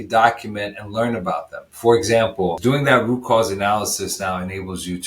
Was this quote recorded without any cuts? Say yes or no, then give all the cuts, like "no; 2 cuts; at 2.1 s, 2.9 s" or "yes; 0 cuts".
no; 1 cut; at 2.6 s